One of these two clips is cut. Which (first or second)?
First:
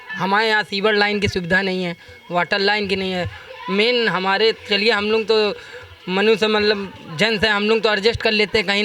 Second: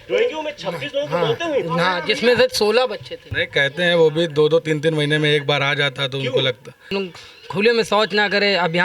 second